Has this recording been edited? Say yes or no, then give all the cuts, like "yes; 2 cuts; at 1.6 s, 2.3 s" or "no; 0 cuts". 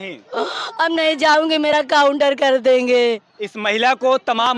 no; 0 cuts